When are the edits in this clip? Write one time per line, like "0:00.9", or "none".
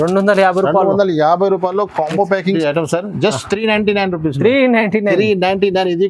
0:02.5